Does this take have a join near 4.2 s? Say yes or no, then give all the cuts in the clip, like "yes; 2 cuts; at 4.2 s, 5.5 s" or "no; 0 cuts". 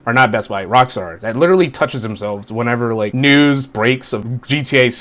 yes; 2 cuts; at 3.1 s, 4.2 s